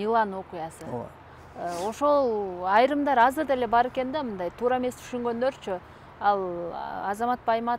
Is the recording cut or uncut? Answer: uncut